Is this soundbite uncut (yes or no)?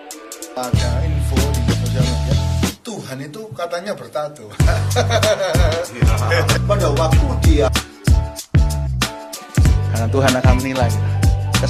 yes